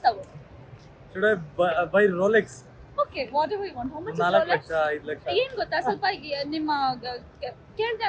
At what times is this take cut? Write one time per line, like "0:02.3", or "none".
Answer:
0:02.7
0:05.4